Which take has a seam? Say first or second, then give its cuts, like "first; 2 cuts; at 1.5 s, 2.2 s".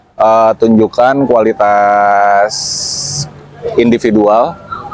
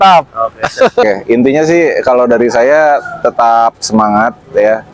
second; 1 cut; at 1.0 s